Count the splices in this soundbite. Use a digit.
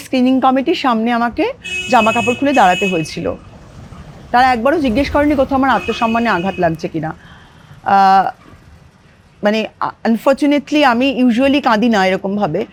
0